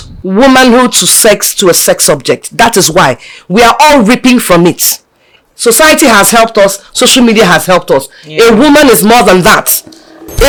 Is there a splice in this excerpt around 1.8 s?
no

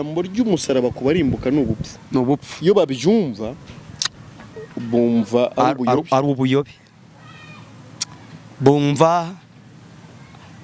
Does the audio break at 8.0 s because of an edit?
no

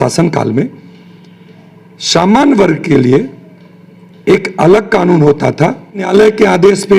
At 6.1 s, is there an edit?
yes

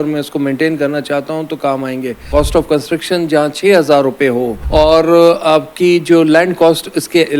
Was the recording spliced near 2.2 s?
yes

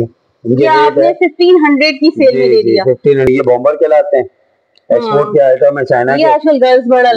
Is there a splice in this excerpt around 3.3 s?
yes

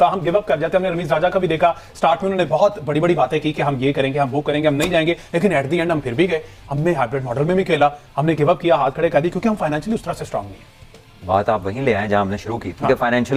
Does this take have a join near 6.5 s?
no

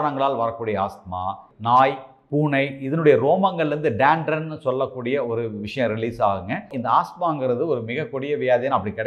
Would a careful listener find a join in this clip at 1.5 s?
yes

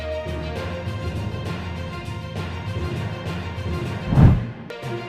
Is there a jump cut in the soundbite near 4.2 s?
yes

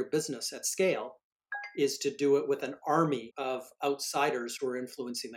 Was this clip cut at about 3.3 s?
yes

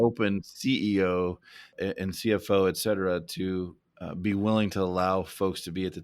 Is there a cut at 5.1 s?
no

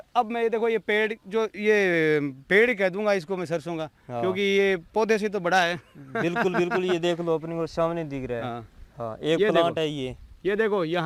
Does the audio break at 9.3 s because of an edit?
no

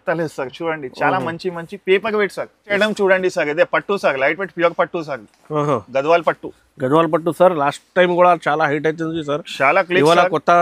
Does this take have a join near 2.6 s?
yes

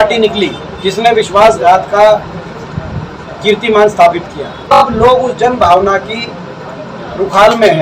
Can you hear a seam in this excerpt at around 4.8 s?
yes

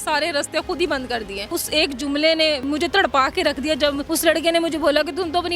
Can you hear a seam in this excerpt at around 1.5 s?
yes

